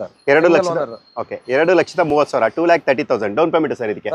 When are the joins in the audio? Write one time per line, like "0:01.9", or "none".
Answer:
none